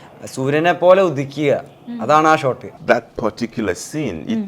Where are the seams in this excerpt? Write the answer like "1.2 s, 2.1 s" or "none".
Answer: 2.7 s